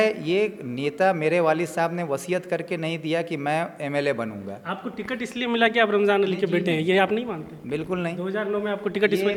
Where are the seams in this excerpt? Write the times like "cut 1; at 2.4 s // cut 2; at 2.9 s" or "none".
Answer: none